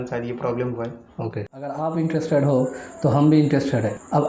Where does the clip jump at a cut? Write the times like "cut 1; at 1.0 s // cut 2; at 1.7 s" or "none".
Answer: cut 1; at 1.7 s